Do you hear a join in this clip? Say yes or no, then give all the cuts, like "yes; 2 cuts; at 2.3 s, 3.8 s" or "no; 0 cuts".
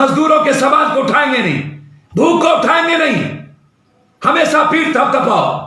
no; 0 cuts